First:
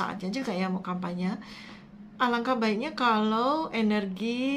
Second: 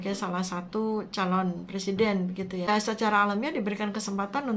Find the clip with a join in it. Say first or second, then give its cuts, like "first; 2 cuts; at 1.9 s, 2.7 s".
second; 1 cut; at 2.7 s